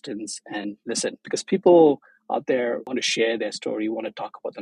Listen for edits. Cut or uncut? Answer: cut